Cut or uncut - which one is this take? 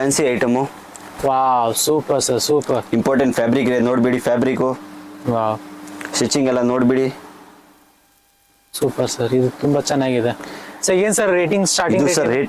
uncut